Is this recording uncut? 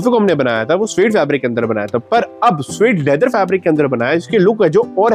yes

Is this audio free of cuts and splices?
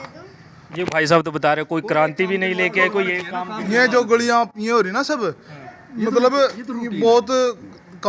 yes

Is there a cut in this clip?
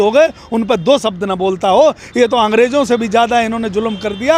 no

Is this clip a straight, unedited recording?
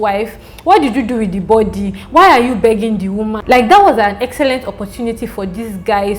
no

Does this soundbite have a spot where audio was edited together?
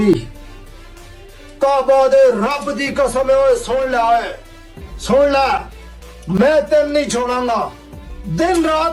no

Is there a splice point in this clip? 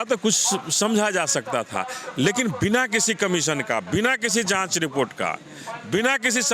no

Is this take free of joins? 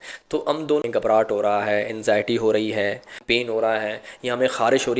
no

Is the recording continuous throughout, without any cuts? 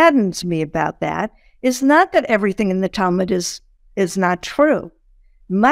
yes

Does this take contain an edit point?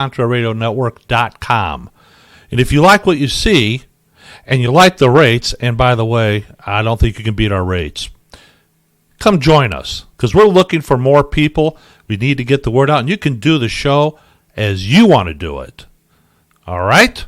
no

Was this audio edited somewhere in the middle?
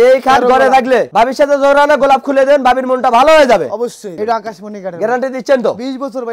yes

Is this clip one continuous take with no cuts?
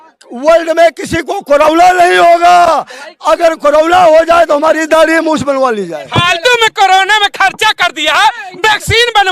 yes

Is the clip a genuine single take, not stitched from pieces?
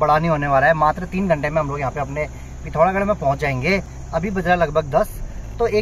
yes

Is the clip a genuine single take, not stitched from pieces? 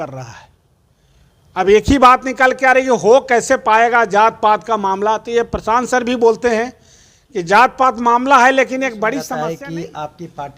no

